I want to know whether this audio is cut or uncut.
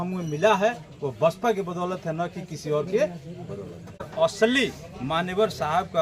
cut